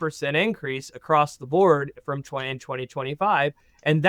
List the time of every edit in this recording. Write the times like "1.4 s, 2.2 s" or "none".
none